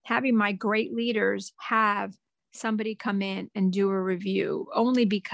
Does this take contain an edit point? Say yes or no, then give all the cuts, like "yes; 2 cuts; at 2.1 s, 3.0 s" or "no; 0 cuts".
yes; 1 cut; at 1.5 s